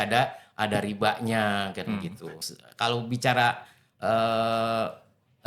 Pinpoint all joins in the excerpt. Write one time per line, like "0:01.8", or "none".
0:02.3